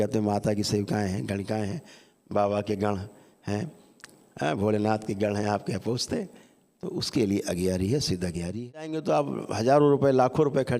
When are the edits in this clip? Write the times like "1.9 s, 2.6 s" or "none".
9.0 s